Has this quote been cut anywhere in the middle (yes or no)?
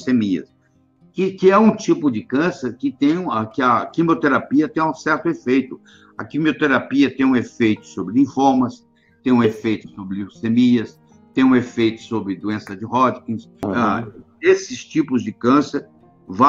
yes